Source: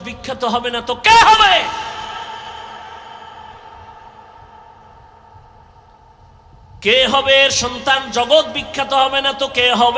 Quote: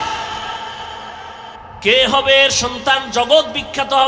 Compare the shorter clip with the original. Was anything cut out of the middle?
yes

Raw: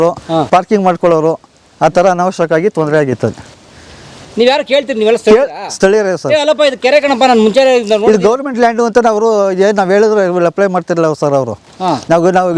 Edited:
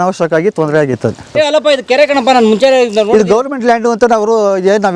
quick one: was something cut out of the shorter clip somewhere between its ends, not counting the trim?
yes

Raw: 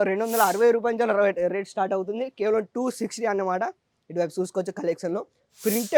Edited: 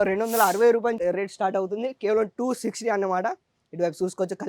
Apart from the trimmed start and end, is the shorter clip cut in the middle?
yes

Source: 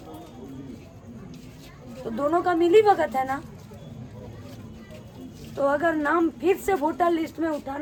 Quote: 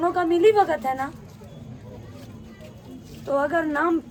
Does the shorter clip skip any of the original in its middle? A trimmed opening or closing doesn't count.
no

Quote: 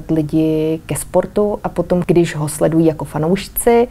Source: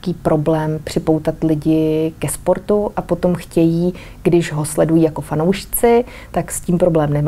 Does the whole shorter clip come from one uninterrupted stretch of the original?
no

